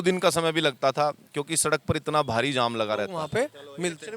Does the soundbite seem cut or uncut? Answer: cut